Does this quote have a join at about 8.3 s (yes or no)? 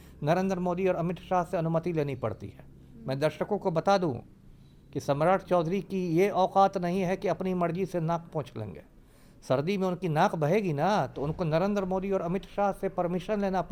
no